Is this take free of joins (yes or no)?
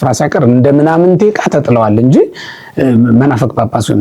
yes